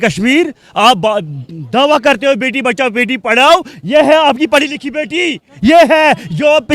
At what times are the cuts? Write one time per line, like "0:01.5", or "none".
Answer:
none